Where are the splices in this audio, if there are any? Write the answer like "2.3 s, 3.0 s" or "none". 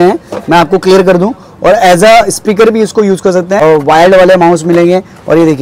3.6 s